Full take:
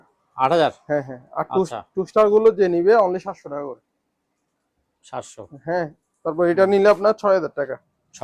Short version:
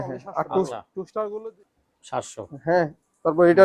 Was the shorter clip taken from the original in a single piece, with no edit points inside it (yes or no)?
no